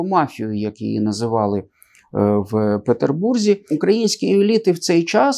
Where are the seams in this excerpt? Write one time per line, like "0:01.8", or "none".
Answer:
0:03.7